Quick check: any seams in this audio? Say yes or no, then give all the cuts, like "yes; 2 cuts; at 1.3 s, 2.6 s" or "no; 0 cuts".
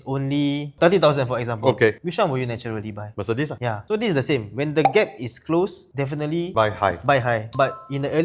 no; 0 cuts